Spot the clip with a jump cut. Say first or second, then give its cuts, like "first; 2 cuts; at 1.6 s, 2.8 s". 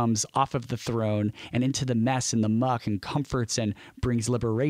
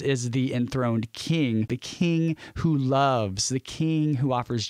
second; 1 cut; at 1.8 s